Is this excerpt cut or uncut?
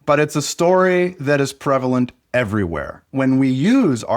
cut